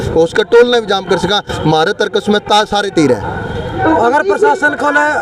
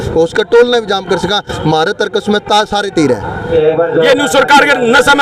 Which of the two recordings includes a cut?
second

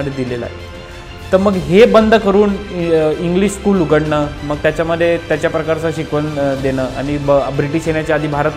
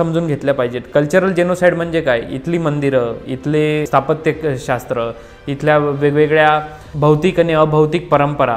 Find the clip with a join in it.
second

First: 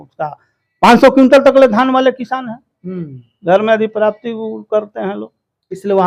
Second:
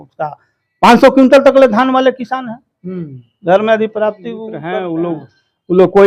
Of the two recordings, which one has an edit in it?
second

